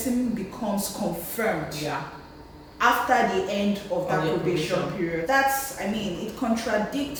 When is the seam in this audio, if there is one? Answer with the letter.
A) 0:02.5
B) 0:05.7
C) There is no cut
C